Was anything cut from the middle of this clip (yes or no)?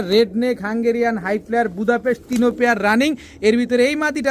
no